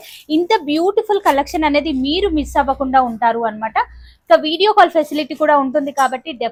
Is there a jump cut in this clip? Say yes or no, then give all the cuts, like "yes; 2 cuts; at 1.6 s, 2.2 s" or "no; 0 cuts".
no; 0 cuts